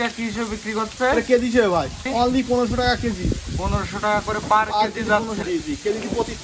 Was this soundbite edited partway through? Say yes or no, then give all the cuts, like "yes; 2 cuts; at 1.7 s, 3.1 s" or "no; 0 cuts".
yes; 2 cuts; at 2.0 s, 5.4 s